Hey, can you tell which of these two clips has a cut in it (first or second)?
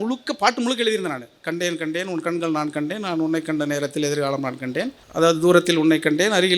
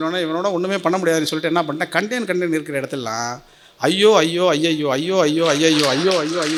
first